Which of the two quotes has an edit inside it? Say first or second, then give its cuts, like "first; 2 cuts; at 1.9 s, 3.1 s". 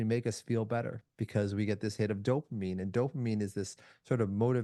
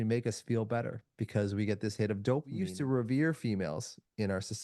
second; 1 cut; at 2.7 s